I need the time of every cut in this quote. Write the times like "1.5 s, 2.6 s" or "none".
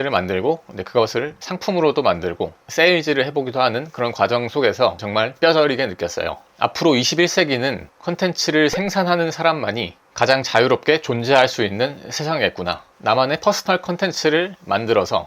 5.0 s, 6.4 s, 12.9 s